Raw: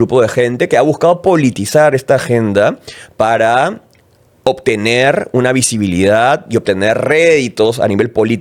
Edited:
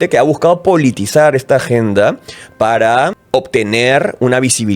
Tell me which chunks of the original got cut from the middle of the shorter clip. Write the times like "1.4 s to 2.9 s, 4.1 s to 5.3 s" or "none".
3.8 s to 4.3 s

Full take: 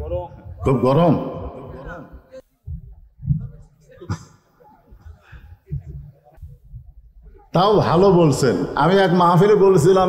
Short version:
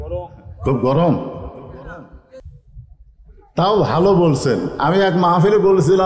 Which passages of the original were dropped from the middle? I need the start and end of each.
2.5 s to 6.5 s

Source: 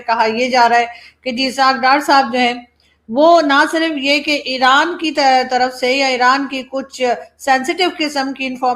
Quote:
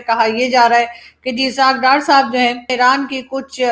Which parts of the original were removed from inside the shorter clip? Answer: 2.7 s to 6.1 s

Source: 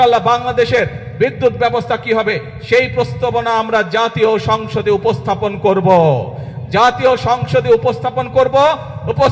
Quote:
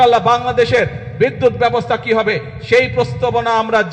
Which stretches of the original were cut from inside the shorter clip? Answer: none

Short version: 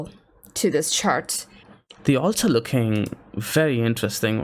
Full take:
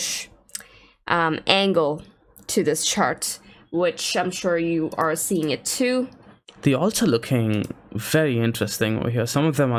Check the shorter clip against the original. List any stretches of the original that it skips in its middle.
3.6 s to 6.2 s

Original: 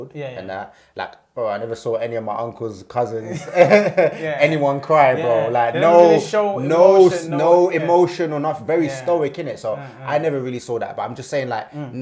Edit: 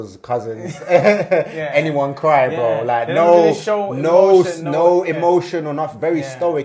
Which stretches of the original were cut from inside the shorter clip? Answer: none

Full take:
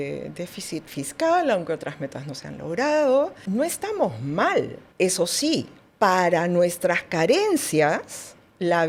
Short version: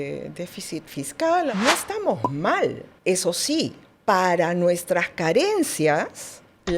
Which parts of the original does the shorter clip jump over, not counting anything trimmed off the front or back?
1.5 s to 3.5 s

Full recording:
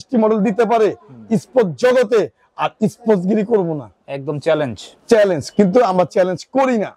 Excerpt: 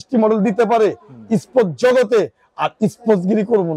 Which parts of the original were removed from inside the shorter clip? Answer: none

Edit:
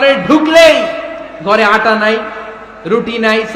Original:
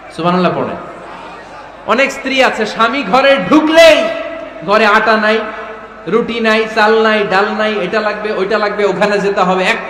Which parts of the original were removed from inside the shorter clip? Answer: none

